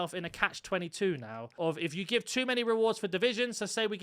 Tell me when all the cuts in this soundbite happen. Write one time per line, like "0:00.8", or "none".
0:01.4